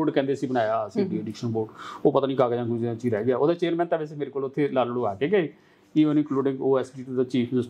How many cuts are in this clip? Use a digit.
0